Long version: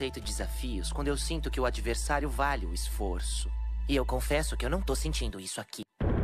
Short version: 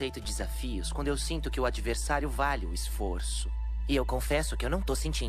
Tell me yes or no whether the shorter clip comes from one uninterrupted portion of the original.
yes